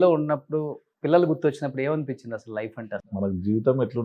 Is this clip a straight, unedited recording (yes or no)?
no